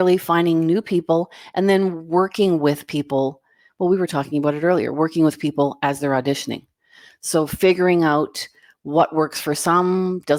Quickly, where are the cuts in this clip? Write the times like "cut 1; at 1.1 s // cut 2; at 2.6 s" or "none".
none